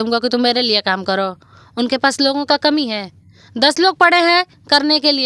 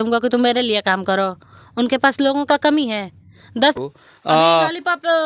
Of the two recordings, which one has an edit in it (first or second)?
second